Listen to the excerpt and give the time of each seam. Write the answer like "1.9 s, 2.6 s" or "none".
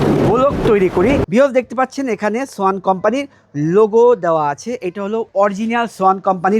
1.2 s